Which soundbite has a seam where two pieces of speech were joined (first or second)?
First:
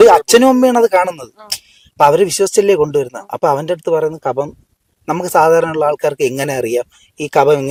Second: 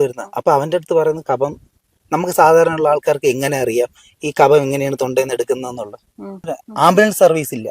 second